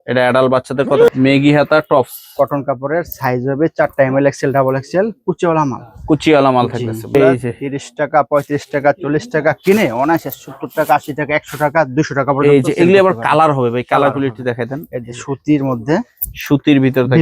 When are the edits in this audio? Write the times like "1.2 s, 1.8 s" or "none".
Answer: 1.1 s, 7.1 s